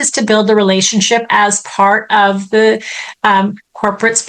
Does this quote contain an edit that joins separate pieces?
no; 0 cuts

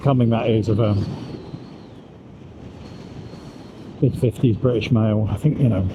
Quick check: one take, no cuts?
yes; 0 cuts

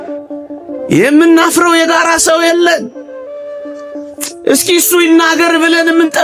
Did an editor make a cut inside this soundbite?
no; 0 cuts

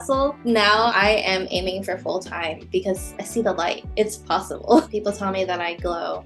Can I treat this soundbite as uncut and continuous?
no; 3 cuts; at 0.9 s, 3.1 s, 4.9 s

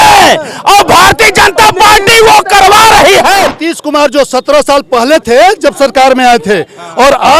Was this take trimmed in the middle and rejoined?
yes; 1 cut; at 3.5 s

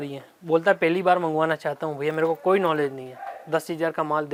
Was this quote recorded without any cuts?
yes; 0 cuts

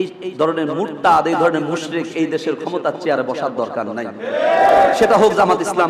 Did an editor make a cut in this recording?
yes; 1 cut; at 4.7 s

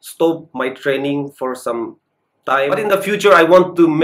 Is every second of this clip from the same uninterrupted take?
no; 1 cut; at 2.7 s

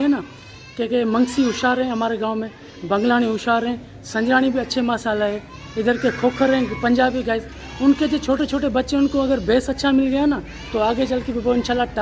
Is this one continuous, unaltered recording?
yes; 0 cuts

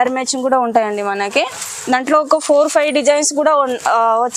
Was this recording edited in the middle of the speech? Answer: no; 0 cuts

